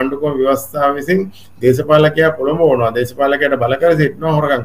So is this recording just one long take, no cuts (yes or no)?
yes